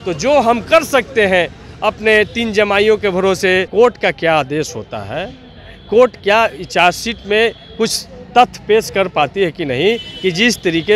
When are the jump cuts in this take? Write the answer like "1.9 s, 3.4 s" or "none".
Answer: 3.7 s

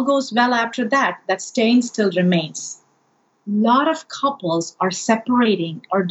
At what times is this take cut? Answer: 3.4 s

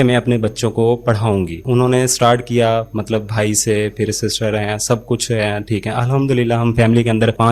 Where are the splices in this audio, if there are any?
none

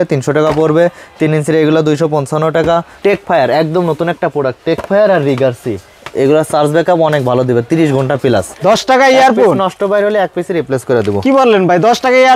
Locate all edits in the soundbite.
2.9 s, 8.5 s

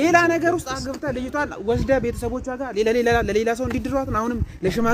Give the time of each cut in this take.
none

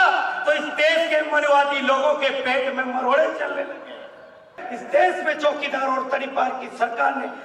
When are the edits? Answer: 4.7 s

